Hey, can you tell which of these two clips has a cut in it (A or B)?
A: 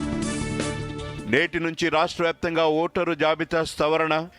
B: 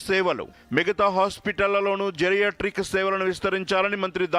A